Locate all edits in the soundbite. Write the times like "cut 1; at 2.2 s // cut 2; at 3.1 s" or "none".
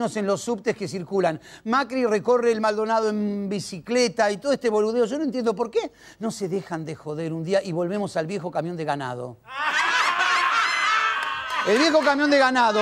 cut 1; at 3.6 s

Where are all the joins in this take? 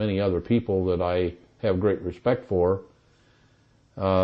none

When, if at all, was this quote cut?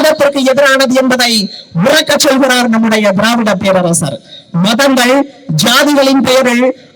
none

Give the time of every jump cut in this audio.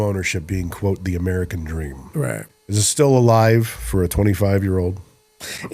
cut 1; at 2.5 s

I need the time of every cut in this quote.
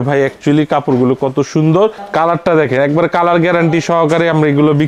cut 1; at 2.0 s

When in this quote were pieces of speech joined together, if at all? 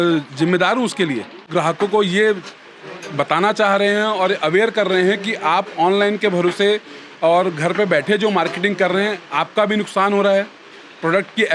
cut 1; at 1.5 s

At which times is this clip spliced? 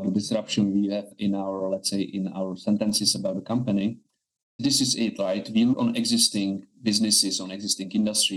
cut 1; at 1.1 s // cut 2; at 4.6 s // cut 3; at 5.8 s

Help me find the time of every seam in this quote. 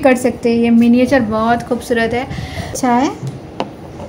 cut 1; at 2.7 s

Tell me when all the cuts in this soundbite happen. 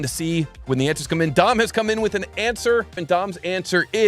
cut 1; at 3.0 s

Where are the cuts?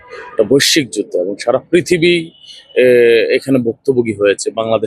none

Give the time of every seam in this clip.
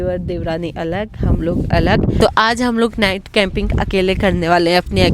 cut 1; at 2.2 s

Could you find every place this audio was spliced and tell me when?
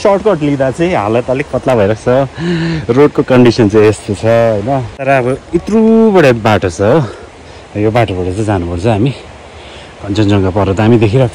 cut 1; at 4.9 s

